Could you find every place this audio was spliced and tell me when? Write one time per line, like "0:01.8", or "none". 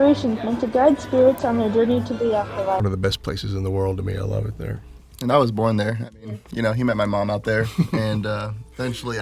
0:02.8

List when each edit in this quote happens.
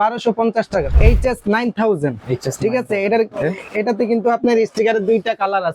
0:00.9

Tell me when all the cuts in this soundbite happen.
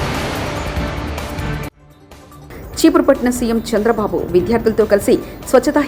none

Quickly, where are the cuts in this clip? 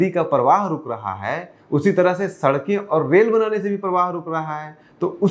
none

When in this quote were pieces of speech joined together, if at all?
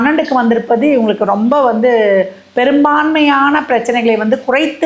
none

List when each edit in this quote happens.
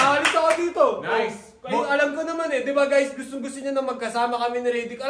none

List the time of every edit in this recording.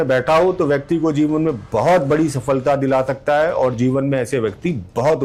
none

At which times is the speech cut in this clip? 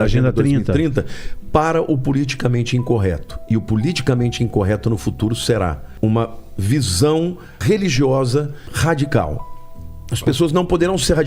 0:05.8
0:07.6
0:08.7

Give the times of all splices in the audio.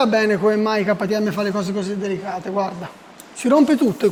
none

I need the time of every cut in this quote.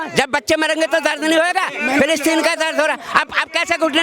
none

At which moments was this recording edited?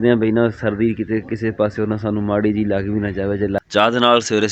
0:03.6

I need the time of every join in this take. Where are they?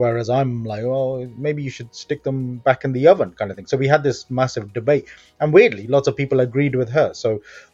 none

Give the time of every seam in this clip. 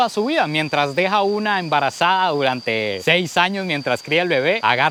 none

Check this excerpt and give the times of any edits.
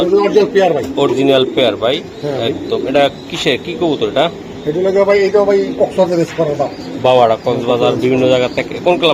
none

